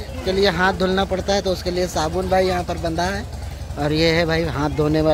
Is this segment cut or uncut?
uncut